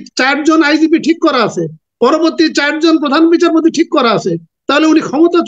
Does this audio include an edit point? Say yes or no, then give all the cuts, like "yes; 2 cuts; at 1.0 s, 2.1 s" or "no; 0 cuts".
no; 0 cuts